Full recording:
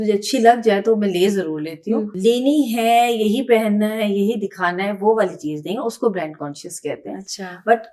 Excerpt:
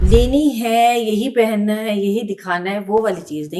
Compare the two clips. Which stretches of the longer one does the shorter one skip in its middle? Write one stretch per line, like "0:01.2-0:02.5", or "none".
none